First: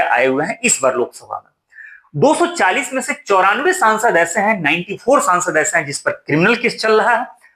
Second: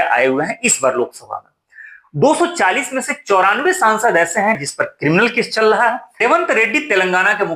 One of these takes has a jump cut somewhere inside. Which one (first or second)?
second